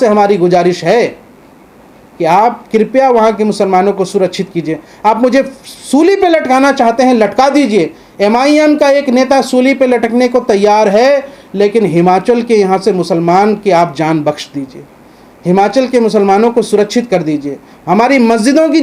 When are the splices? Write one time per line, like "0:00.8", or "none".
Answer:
none